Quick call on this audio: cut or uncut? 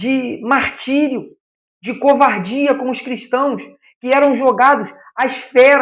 uncut